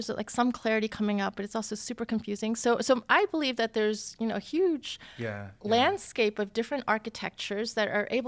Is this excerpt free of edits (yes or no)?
yes